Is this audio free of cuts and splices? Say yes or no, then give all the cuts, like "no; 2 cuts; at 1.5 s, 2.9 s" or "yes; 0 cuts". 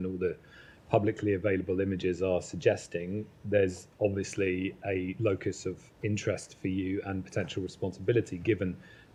yes; 0 cuts